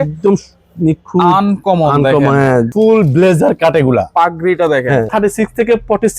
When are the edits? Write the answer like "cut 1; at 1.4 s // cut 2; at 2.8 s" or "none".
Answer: cut 1; at 2.7 s // cut 2; at 5.1 s